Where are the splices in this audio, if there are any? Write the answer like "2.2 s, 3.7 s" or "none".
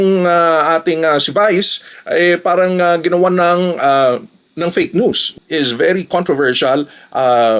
5.3 s